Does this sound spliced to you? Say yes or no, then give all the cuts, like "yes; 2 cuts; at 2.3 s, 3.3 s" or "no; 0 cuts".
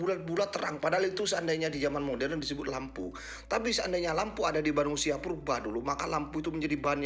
no; 0 cuts